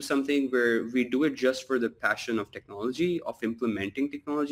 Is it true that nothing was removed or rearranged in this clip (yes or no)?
yes